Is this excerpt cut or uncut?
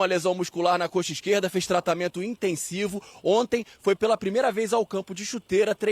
uncut